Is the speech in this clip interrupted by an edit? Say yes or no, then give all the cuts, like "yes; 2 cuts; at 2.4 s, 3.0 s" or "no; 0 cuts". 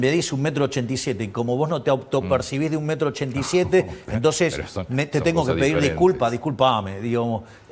no; 0 cuts